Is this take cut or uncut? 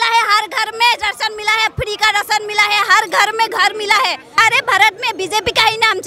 cut